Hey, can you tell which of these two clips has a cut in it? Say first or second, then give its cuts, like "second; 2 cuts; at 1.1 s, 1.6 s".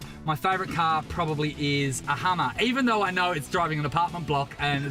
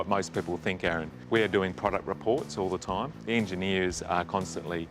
second; 2 cuts; at 1.1 s, 3.2 s